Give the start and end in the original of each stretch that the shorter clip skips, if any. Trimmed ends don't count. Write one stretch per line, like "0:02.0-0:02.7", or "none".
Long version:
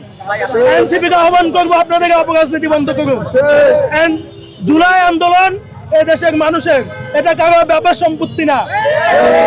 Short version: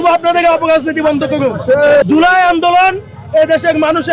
0:03.7-0:04.6